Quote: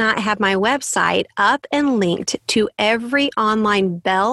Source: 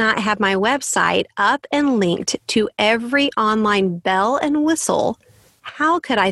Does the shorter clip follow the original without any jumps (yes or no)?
yes